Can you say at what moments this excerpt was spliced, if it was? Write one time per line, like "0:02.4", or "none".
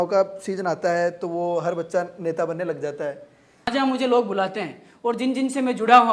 0:03.7